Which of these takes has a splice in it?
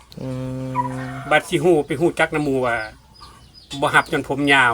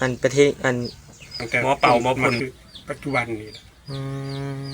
second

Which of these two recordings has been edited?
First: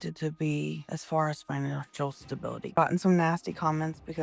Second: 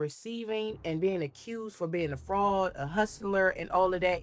first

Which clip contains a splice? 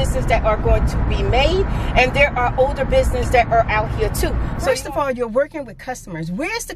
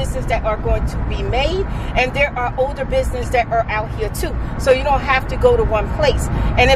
first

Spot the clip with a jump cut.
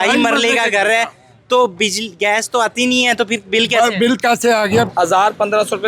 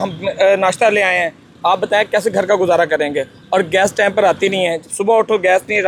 first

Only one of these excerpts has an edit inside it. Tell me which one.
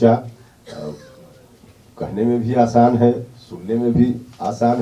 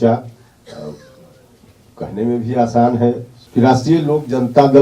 second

